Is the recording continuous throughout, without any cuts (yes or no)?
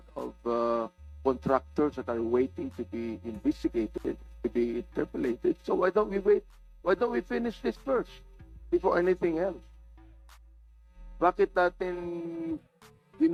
yes